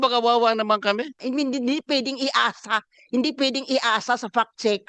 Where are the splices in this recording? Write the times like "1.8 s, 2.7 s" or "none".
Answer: 1.2 s